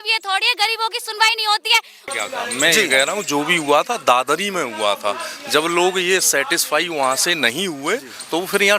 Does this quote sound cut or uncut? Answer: cut